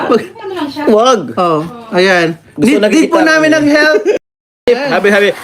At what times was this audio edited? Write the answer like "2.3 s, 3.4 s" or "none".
4.3 s